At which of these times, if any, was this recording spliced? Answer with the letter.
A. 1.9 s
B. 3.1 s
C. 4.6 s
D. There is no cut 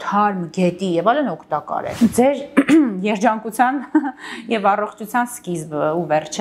A